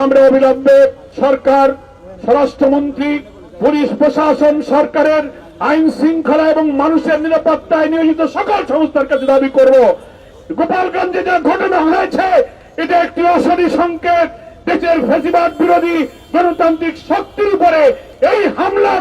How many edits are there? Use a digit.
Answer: 1